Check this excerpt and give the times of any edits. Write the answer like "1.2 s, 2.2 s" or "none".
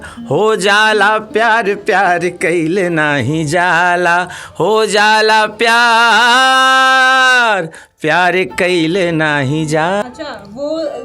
10.0 s